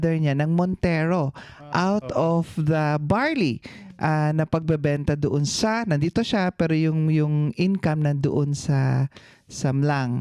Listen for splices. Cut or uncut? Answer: uncut